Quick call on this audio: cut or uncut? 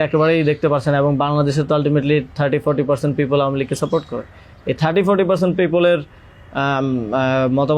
uncut